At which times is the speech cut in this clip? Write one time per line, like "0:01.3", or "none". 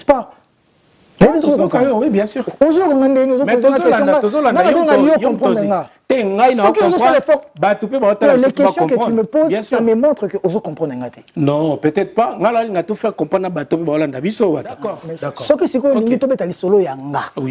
0:14.9